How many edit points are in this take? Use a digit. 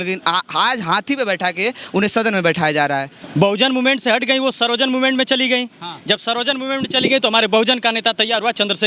1